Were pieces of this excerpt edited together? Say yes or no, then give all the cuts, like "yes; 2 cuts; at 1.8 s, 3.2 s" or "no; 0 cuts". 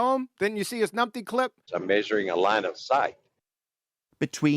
yes; 1 cut; at 1.6 s